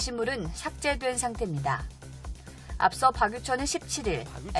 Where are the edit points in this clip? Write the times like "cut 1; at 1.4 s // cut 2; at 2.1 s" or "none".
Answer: cut 1; at 1.4 s